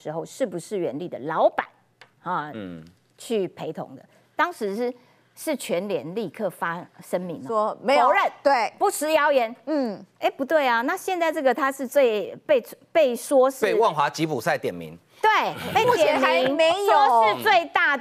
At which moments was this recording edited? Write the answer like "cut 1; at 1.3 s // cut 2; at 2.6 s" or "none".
none